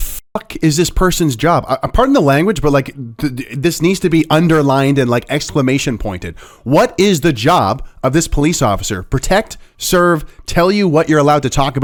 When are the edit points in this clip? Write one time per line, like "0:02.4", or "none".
none